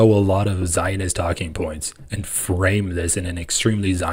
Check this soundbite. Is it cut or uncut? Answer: uncut